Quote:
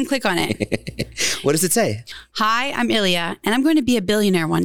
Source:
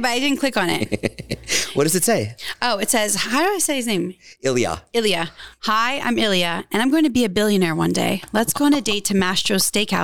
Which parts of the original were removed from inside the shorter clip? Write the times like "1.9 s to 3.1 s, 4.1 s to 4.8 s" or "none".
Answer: 2.4 s to 5.4 s